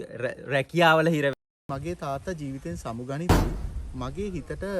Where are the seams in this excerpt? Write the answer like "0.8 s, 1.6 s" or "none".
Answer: 1.4 s